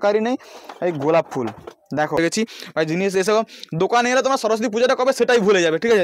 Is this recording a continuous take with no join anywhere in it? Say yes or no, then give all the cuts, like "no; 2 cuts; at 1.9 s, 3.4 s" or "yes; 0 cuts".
no; 1 cut; at 2.2 s